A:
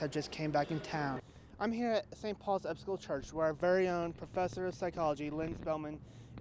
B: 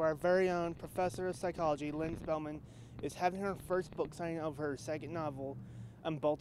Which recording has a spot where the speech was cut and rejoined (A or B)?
A